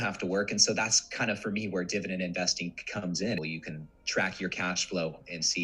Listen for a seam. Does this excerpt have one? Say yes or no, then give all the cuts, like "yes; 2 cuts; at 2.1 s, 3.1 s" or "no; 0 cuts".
yes; 1 cut; at 3.4 s